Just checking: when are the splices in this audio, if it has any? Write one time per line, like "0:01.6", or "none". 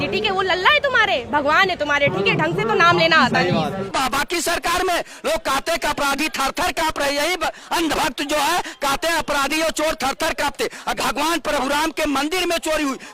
0:03.8
0:10.9